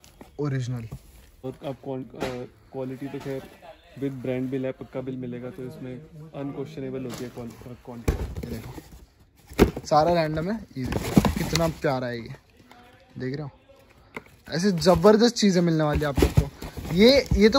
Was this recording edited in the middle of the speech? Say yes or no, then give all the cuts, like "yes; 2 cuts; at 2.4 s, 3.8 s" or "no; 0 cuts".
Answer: yes; 2 cuts; at 1.4 s, 8.1 s